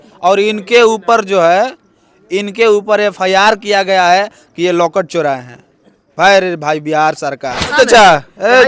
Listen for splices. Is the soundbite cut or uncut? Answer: cut